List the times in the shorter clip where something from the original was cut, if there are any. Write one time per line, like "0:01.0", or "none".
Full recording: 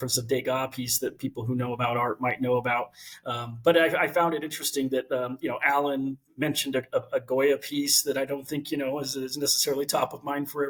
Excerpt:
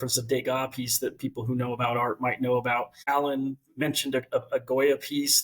0:03.0